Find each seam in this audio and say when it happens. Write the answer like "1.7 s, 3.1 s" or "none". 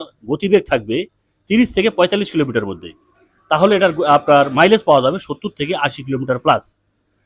none